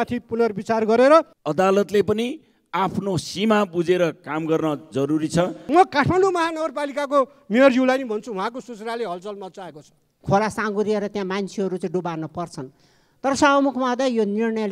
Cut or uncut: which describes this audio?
cut